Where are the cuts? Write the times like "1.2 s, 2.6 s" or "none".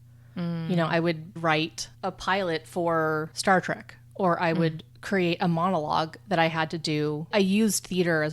1.4 s, 3.3 s, 7.3 s